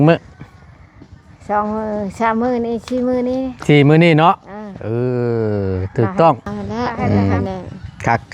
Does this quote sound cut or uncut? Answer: cut